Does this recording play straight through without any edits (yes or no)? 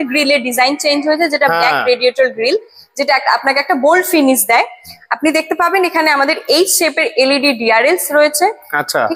yes